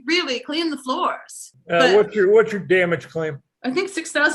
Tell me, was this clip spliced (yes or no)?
yes